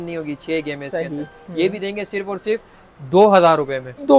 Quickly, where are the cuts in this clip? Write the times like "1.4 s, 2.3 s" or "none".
none